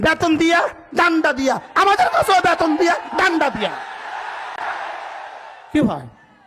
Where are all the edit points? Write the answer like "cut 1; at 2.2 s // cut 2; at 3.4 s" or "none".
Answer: none